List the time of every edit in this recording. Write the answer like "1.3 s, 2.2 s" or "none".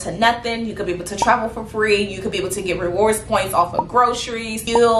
none